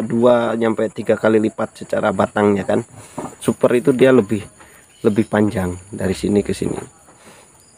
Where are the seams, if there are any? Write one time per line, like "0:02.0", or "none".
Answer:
0:03.5